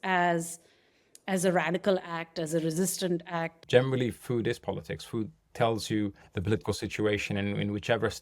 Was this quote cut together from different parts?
yes; 1 cut; at 3.6 s

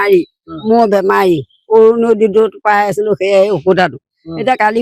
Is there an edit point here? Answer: no; 0 cuts

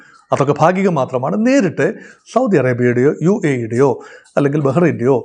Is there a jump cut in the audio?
no; 0 cuts

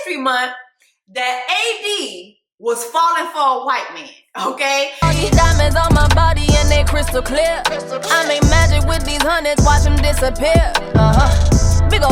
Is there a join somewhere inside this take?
yes; 1 cut; at 4.9 s

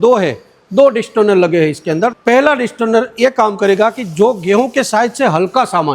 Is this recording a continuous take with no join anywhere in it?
no; 1 cut; at 2.2 s

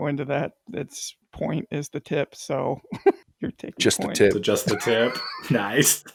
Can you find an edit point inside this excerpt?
no; 0 cuts

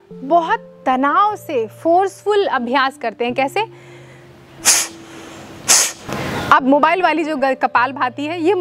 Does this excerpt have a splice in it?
yes; 1 cut; at 6.1 s

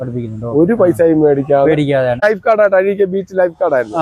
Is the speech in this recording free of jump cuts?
no; 1 cut; at 2.2 s

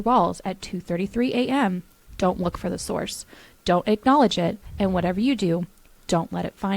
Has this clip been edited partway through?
no; 0 cuts

